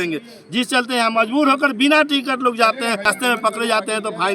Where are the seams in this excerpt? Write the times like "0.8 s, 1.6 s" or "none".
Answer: 3.1 s